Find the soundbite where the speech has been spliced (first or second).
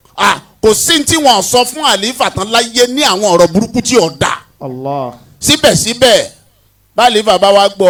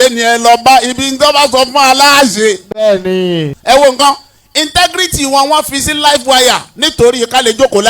second